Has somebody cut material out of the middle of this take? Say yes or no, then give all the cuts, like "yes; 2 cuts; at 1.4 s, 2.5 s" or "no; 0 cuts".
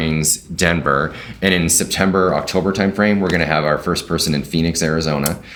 no; 0 cuts